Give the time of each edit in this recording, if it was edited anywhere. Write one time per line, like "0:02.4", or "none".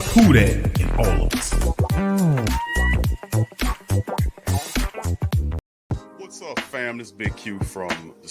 0:05.8